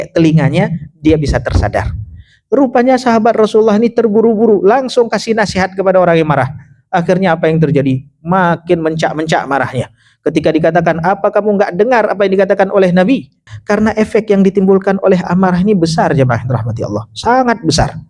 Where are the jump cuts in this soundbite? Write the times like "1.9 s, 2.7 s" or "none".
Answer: 13.4 s

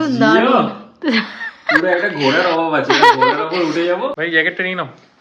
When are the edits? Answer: 4.2 s

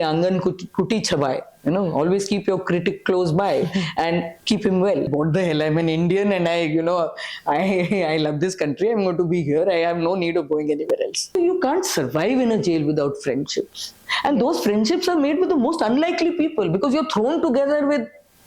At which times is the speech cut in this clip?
5.1 s, 11.3 s

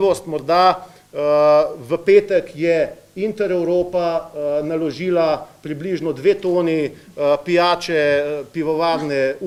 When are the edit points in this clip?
none

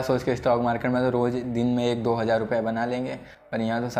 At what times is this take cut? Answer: none

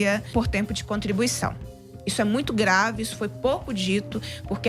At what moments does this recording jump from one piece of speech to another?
none

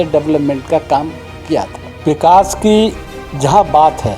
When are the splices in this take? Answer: 1.9 s

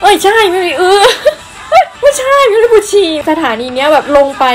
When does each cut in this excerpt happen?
1.9 s, 3.2 s

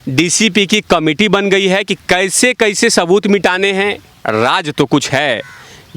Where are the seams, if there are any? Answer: 4.0 s

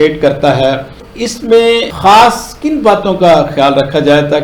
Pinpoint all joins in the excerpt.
1.0 s

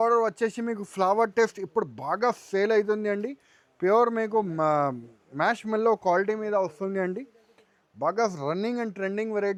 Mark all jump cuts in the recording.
none

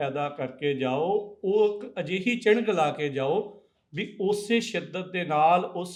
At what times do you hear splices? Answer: none

